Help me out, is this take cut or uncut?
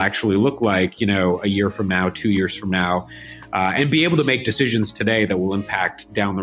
uncut